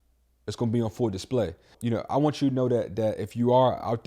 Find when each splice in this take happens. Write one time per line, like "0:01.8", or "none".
0:01.7